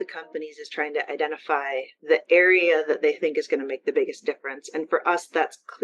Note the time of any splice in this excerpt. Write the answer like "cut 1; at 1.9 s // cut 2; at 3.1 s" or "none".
cut 1; at 1.9 s